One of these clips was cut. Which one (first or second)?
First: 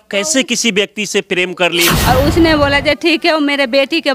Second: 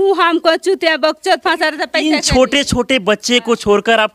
first